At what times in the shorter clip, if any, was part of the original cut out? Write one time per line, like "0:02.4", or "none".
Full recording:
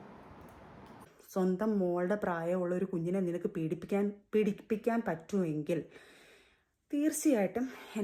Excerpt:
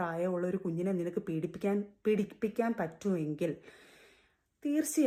none